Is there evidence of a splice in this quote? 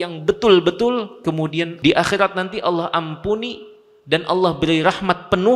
yes; 1 cut; at 1.7 s

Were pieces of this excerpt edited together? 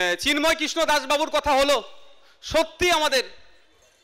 no; 0 cuts

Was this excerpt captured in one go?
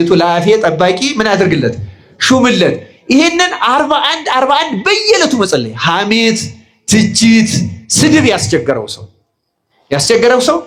yes; 0 cuts

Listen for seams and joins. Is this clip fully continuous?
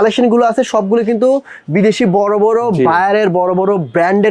yes; 0 cuts

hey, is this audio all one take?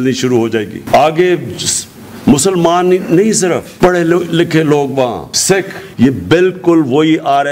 no; 1 cut; at 5.9 s

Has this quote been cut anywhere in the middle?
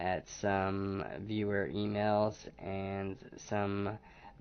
yes; 1 cut; at 1.9 s

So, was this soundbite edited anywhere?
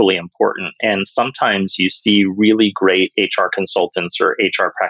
no; 0 cuts

